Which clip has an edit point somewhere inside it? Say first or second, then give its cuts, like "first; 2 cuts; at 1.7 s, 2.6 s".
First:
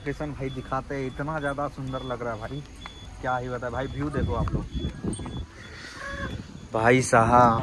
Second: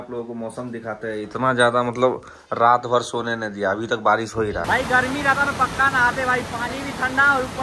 second; 1 cut; at 4.6 s